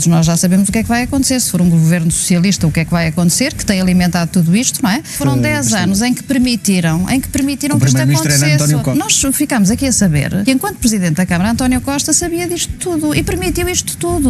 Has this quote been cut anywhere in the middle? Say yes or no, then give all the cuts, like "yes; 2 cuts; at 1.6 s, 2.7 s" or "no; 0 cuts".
yes; 3 cuts; at 5.1 s, 8.9 s, 10.4 s